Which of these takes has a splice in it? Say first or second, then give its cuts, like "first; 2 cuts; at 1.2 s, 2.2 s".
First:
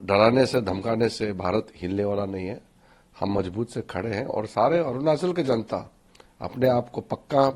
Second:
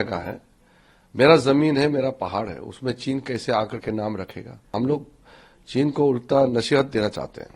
second; 1 cut; at 4.7 s